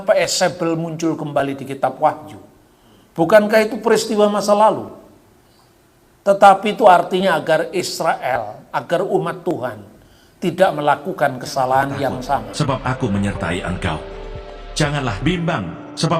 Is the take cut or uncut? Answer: cut